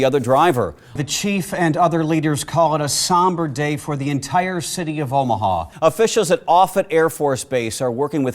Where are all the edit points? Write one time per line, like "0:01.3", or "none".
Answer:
0:01.0
0:05.7